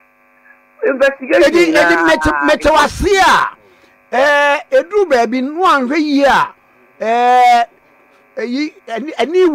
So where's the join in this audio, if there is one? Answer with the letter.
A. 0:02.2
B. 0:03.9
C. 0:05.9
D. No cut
A